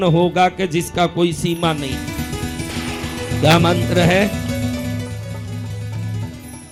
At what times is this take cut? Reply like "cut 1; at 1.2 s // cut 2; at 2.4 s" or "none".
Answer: none